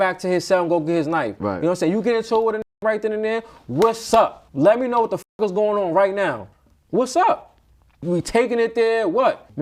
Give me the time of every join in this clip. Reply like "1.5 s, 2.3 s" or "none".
none